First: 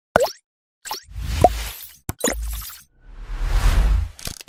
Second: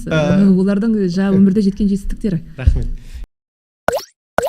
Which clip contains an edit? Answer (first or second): second